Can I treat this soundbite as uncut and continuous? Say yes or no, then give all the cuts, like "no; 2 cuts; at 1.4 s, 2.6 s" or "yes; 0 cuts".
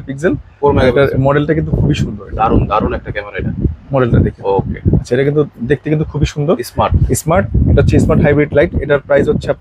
yes; 0 cuts